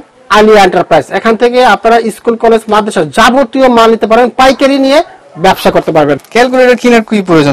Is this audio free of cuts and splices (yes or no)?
no